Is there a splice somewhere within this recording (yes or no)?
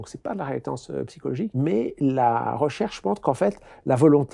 yes